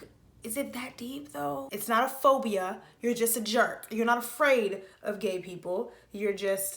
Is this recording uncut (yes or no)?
no